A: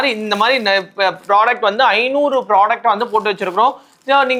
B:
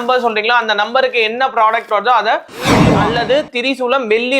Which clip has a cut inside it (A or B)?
B